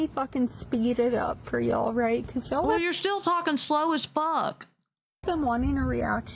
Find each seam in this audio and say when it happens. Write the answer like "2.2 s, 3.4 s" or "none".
none